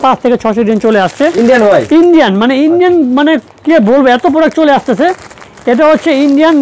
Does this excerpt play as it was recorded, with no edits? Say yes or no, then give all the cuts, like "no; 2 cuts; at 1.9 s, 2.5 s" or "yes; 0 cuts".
yes; 0 cuts